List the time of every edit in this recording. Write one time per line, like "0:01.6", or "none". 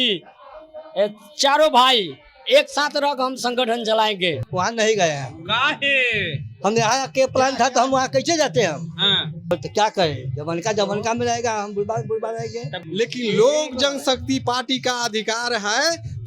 0:04.4
0:09.5
0:12.8